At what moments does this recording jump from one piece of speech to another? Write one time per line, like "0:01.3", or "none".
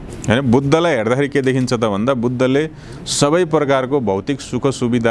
none